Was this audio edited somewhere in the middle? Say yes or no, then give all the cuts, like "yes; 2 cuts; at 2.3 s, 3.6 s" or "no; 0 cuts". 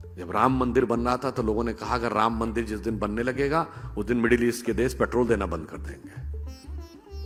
no; 0 cuts